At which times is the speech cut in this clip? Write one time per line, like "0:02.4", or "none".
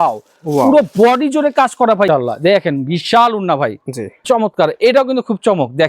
0:02.1
0:04.2